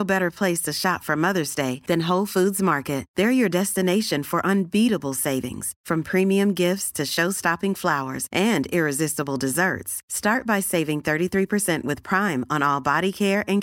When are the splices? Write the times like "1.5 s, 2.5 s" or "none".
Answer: none